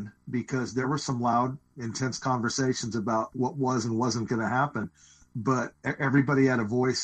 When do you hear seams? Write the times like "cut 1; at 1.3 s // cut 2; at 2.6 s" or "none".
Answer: cut 1; at 0.8 s // cut 2; at 1.7 s // cut 3; at 3.3 s // cut 4; at 5.8 s